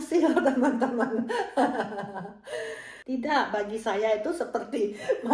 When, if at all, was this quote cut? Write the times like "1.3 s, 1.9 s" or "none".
2.9 s